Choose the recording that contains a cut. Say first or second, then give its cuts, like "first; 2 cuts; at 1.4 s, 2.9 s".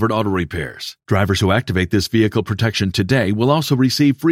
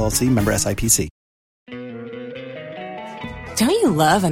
second; 1 cut; at 1.6 s